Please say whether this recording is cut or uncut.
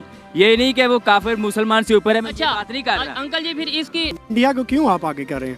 cut